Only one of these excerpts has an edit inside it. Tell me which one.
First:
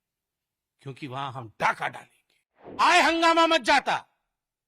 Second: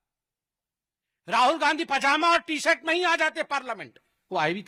first; 1 cut; at 2.8 s

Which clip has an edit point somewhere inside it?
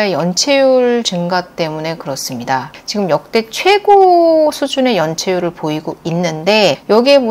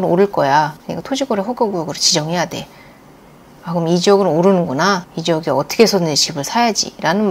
first; 1 cut; at 2.8 s

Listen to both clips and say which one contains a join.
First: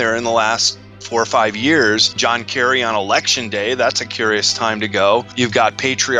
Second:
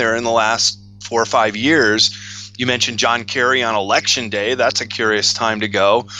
first; 2 cuts; at 2.1 s, 5.3 s

